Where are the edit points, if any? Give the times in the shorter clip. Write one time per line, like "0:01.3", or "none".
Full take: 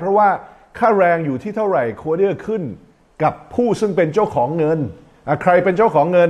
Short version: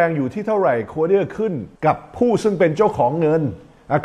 0:01.7